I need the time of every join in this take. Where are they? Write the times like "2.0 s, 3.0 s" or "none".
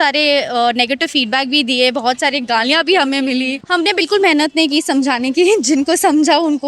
3.6 s